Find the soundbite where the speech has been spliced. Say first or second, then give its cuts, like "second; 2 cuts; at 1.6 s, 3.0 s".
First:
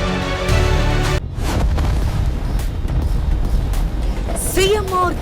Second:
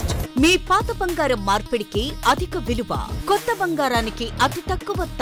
first; 1 cut; at 1.2 s